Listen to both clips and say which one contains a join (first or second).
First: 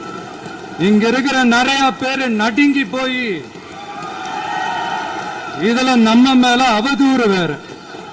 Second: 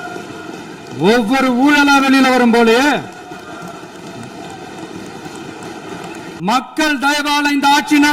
second